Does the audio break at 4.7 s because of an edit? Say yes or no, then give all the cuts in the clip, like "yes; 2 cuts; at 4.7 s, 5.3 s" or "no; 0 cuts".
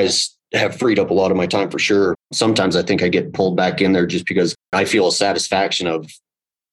yes; 2 cuts; at 2.3 s, 4.7 s